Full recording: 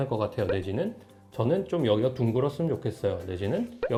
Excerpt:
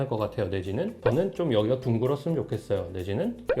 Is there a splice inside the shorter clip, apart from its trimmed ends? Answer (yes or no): yes